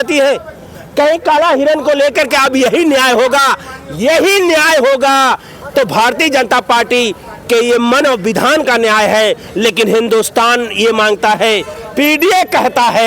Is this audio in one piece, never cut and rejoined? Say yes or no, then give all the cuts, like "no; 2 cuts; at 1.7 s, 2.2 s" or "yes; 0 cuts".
yes; 0 cuts